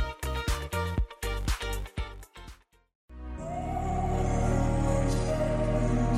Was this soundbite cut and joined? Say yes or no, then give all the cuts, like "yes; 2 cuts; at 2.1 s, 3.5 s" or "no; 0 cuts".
yes; 1 cut; at 2.9 s